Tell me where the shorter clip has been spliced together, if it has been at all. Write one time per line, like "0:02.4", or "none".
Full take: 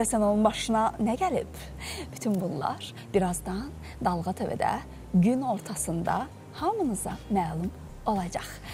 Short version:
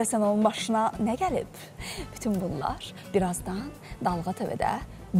none